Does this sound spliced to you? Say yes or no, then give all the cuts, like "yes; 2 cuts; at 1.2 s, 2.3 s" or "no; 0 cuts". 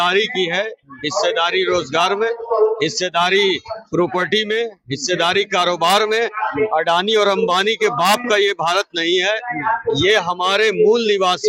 no; 0 cuts